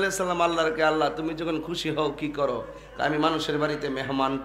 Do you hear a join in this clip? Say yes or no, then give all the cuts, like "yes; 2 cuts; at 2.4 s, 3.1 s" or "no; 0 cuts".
no; 0 cuts